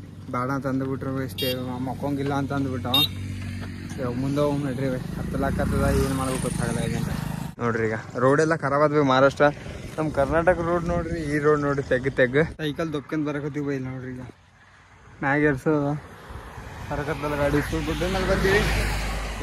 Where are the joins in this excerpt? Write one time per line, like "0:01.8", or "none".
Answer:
0:07.5
0:12.6